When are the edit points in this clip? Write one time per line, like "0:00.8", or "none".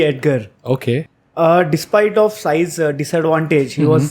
0:01.2